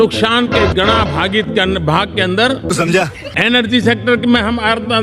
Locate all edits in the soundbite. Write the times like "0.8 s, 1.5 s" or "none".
2.7 s

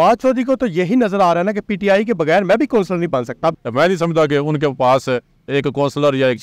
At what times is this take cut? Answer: 3.5 s

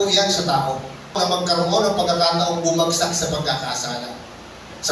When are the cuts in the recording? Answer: 1.1 s

